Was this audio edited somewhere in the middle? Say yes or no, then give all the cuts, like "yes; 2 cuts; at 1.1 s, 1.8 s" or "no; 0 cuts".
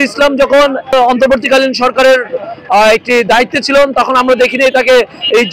yes; 1 cut; at 0.9 s